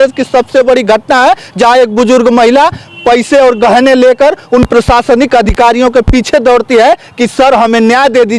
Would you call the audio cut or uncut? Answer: uncut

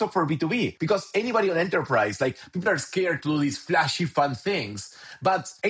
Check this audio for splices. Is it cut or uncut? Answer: uncut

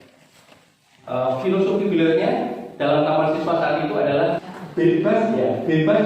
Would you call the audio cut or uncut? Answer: cut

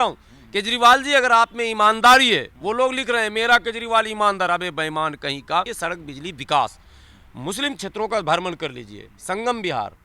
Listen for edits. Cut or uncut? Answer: cut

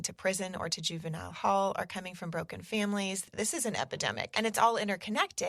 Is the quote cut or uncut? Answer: cut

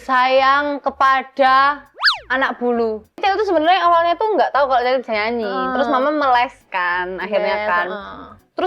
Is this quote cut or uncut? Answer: cut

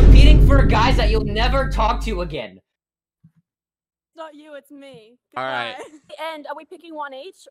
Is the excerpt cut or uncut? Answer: cut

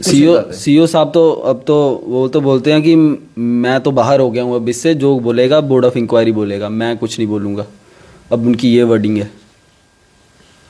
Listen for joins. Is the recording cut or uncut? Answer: uncut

